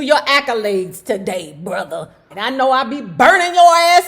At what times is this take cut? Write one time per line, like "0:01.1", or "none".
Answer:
0:02.3

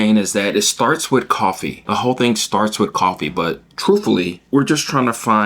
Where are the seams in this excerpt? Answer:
0:01.7
0:04.4

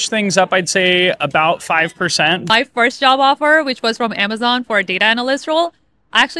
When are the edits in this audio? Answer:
0:02.4

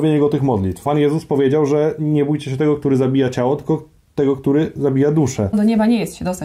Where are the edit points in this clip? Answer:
0:00.8
0:05.5

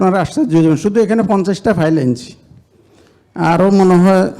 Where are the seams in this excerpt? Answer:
none

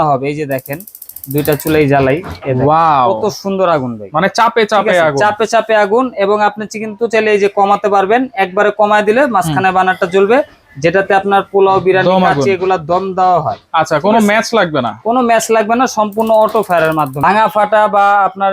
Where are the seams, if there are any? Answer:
0:17.2

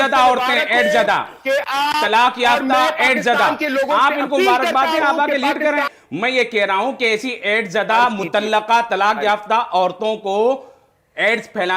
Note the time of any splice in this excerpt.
0:05.9

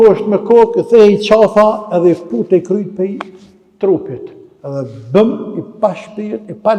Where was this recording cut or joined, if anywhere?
none

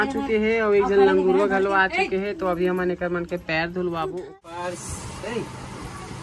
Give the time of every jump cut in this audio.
0:04.6

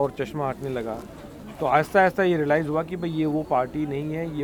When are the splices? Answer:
none

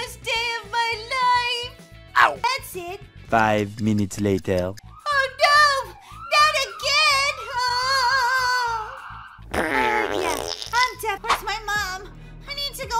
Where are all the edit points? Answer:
0:02.7
0:11.2

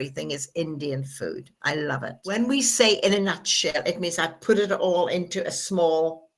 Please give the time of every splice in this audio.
0:02.2

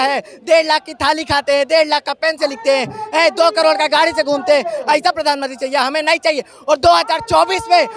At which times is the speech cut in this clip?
none

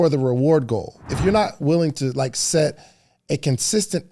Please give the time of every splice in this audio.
0:01.1

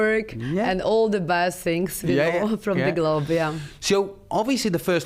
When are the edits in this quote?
none

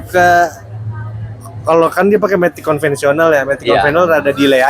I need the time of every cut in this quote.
none

